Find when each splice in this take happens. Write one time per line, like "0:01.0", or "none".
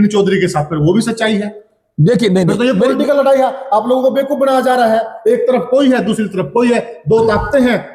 none

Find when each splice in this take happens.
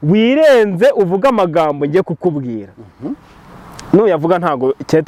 none

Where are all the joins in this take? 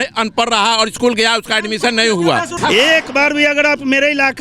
0:02.5

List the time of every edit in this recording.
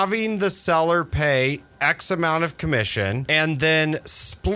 0:03.2

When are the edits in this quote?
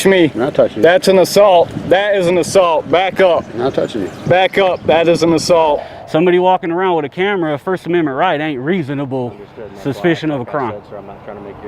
0:05.9

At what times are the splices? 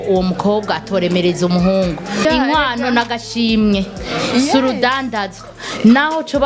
0:02.2

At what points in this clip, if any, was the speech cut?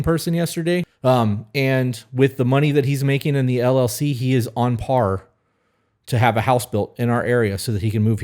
0:00.9

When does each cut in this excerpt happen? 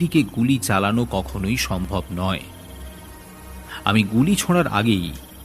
0:02.4
0:03.8

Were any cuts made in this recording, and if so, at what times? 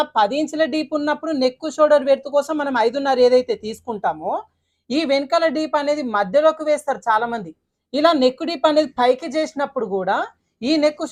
none

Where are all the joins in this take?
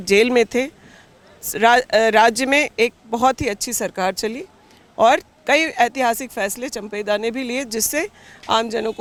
none

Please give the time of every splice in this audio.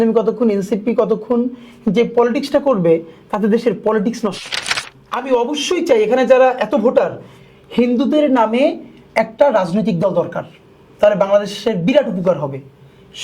0:05.0

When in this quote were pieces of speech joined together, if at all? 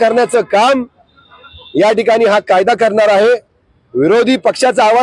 none

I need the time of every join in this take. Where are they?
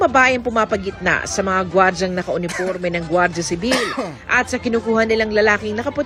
none

